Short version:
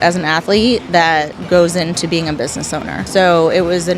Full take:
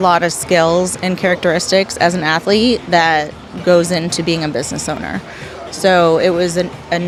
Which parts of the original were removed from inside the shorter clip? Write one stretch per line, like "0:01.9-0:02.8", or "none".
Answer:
0:03.3-0:03.5
0:05.1-0:05.7